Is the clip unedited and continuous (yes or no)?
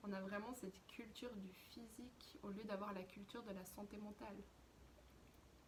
yes